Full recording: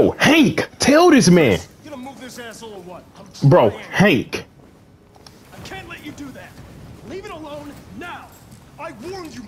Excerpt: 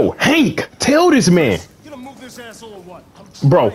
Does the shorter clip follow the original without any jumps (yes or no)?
yes